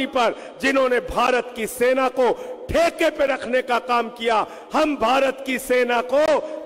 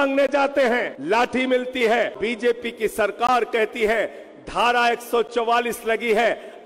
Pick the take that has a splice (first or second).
second